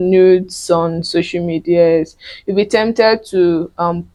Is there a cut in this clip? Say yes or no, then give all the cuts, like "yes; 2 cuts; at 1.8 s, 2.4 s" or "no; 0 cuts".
no; 0 cuts